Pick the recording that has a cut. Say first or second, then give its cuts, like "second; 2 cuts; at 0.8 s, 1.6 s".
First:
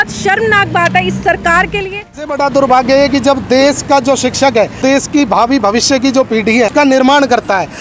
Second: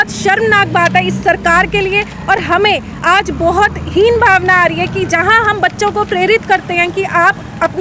first; 3 cuts; at 2.3 s, 4.8 s, 6.7 s